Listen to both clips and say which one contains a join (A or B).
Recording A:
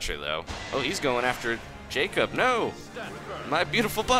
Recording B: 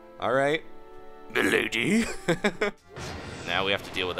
B